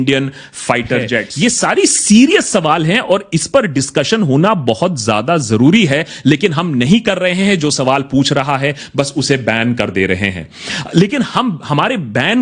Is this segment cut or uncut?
cut